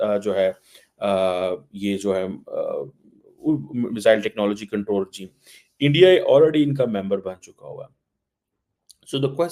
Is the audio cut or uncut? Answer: uncut